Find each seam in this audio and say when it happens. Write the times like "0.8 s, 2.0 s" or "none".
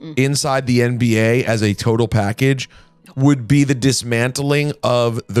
none